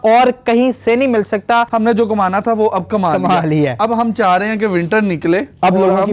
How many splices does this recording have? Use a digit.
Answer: 1